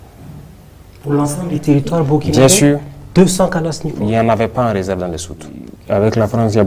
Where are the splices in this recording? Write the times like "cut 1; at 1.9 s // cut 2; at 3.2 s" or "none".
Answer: cut 1; at 5.7 s

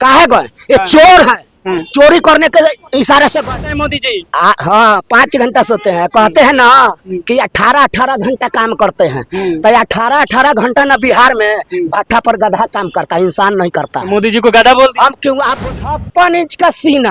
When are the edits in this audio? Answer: cut 1; at 3.9 s // cut 2; at 15.6 s

